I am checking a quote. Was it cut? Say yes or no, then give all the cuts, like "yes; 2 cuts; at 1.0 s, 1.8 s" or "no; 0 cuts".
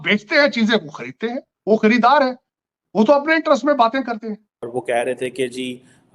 yes; 1 cut; at 4.7 s